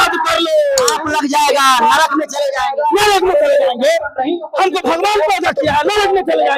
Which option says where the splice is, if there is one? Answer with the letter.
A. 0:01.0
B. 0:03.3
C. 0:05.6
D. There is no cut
A